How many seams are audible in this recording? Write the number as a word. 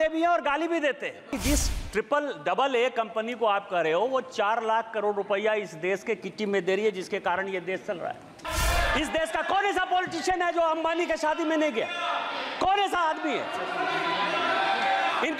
two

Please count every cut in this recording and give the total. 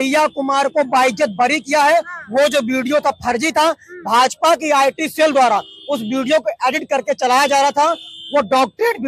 zero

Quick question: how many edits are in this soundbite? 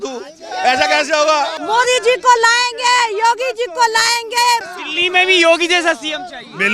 two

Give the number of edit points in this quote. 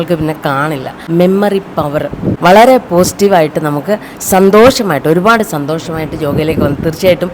two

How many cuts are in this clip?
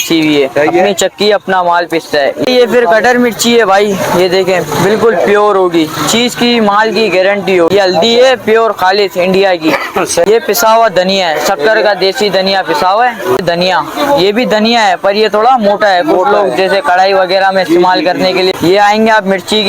five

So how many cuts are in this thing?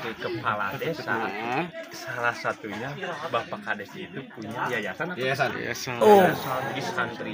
zero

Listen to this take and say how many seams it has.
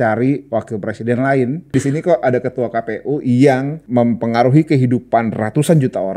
two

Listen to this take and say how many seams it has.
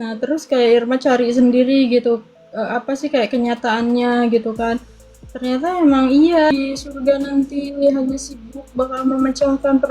one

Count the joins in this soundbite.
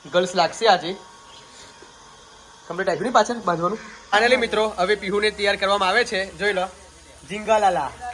one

